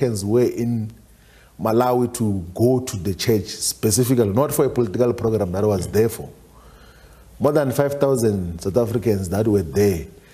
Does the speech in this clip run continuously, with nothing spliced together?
yes; 0 cuts

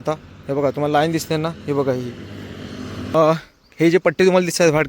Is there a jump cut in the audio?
yes; 1 cut; at 2.9 s

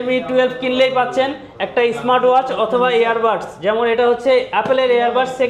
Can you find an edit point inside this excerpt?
no; 0 cuts

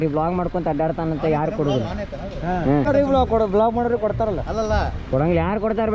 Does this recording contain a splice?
yes; 1 cut; at 2.9 s

